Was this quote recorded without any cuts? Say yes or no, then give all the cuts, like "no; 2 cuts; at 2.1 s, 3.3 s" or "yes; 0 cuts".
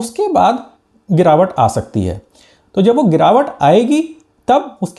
yes; 0 cuts